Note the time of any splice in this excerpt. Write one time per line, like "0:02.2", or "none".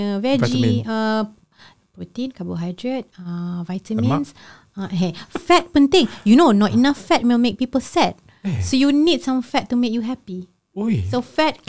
none